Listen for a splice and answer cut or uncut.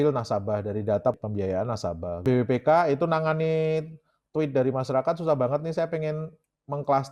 uncut